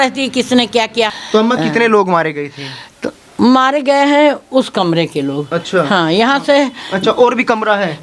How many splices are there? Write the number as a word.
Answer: one